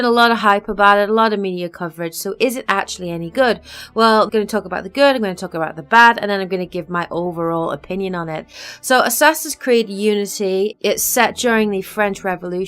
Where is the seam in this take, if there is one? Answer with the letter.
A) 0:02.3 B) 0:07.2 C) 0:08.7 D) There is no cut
A